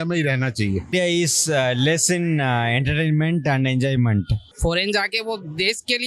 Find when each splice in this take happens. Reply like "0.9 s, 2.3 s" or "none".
0.9 s, 4.4 s

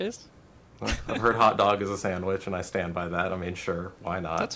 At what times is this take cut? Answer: none

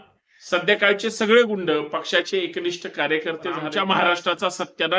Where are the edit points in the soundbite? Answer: 3.6 s

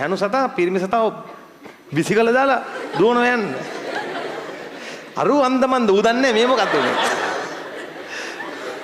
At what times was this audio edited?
none

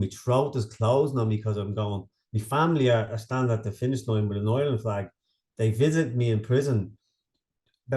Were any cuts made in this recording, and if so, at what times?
none

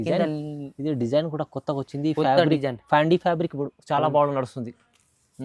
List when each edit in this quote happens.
none

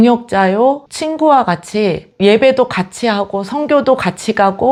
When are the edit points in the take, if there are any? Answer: none

